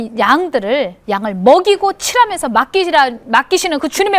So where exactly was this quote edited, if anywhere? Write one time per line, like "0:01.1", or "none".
0:01.0

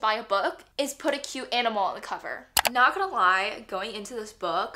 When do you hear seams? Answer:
0:02.3

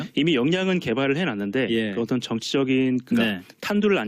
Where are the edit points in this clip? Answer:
none

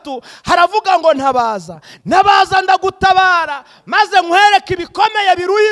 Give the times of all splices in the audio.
none

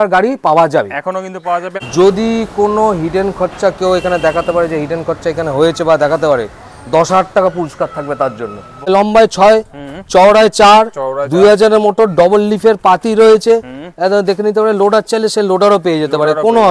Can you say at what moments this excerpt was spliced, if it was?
0:01.7
0:08.9

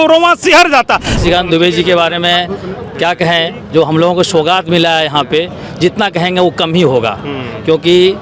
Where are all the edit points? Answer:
0:01.2

